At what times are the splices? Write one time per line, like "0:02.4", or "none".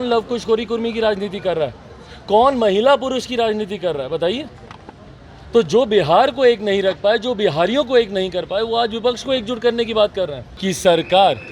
0:10.5